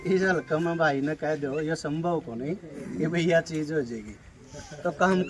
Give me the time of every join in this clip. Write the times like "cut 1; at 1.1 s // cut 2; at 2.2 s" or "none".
none